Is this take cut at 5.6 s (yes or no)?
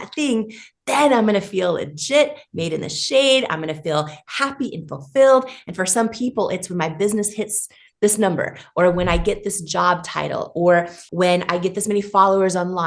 no